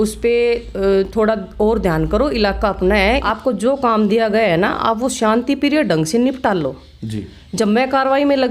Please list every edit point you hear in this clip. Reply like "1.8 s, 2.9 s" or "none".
3.3 s